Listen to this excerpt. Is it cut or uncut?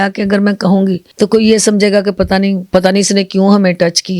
cut